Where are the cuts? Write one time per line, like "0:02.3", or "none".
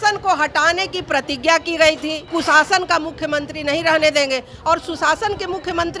0:02.2